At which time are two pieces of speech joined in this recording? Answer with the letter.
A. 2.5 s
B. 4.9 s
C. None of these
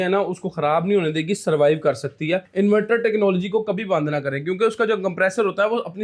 A